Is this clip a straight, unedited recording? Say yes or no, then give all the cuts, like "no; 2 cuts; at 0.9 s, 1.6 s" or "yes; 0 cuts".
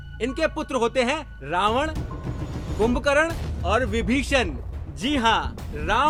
yes; 0 cuts